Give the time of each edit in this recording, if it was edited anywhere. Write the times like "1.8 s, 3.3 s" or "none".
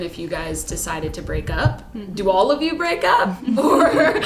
none